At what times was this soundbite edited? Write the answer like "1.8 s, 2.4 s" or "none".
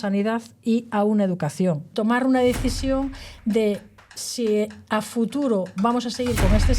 1.9 s